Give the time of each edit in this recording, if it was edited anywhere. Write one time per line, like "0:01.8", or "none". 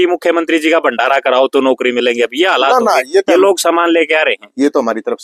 none